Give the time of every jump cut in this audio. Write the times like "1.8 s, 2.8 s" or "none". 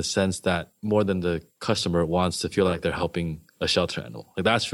3.4 s